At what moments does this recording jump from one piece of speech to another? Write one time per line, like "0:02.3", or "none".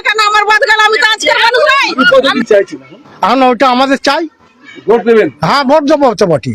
0:02.3